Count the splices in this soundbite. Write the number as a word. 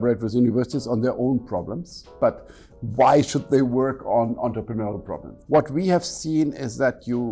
one